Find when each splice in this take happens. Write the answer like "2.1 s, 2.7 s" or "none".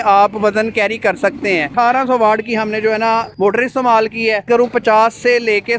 1.7 s, 4.5 s